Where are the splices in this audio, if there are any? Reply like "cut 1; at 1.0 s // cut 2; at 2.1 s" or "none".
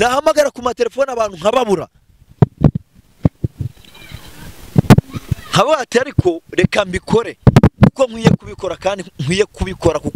none